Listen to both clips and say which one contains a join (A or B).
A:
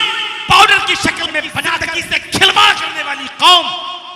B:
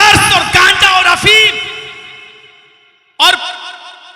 A